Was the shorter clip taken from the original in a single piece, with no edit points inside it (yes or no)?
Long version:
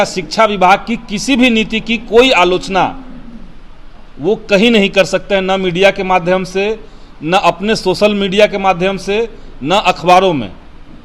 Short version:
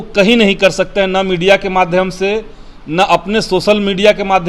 yes